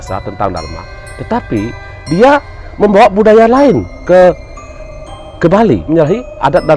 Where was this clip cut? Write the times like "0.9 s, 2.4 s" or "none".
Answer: 5.8 s